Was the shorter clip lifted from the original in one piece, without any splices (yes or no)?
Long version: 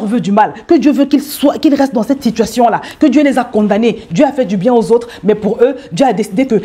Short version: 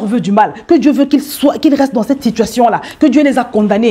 yes